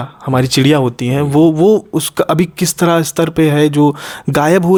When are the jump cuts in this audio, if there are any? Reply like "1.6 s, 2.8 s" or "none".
none